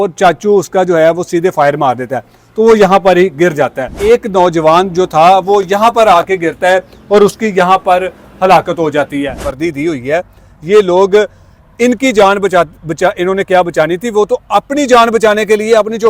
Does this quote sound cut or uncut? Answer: cut